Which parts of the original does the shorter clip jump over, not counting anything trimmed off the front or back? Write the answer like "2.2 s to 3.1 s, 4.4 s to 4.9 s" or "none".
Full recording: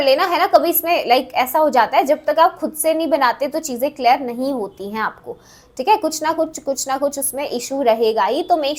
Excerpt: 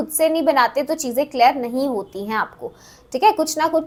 none